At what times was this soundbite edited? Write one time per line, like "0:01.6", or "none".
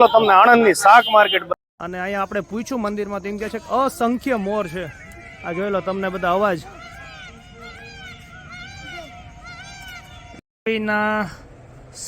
0:01.5
0:10.7